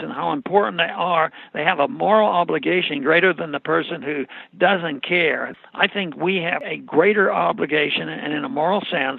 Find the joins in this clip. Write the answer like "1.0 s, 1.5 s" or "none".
5.5 s, 6.6 s